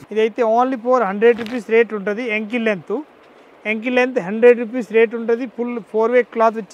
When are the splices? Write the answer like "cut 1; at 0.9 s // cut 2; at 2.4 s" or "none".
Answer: none